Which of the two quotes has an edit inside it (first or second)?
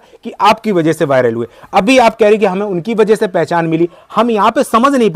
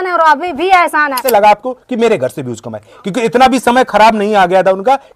second